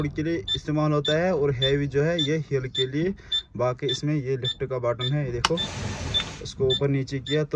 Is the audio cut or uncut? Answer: uncut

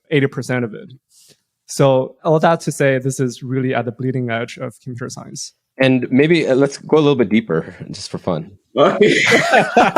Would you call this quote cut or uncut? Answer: cut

